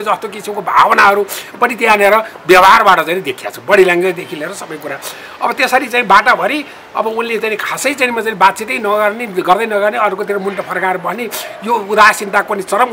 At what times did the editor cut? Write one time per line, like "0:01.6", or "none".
none